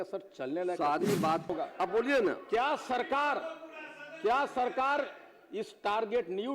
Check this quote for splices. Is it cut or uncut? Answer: cut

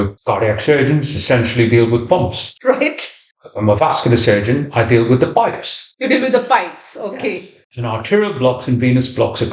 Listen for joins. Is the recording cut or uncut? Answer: cut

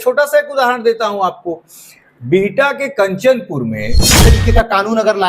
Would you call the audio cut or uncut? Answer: cut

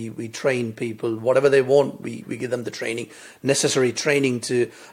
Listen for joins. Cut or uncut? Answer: uncut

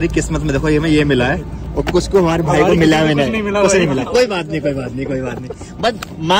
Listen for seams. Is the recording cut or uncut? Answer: uncut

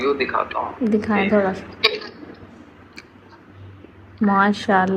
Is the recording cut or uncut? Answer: uncut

